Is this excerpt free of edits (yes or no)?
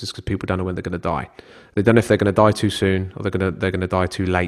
yes